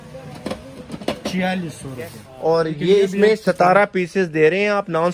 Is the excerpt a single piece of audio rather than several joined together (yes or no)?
no